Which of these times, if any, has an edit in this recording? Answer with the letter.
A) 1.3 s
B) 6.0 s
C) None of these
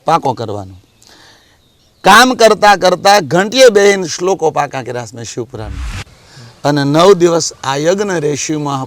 B